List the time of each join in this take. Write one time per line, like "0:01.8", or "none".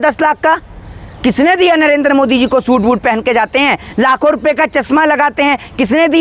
none